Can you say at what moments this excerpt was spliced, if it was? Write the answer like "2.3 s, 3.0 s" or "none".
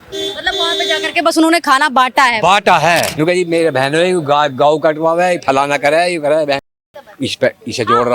3.1 s